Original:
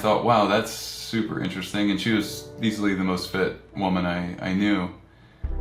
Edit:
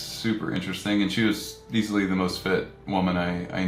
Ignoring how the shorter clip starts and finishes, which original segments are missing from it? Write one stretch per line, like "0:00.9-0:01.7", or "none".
none

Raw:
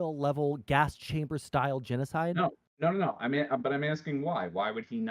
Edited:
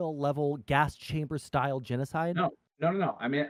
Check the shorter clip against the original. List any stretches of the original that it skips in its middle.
none

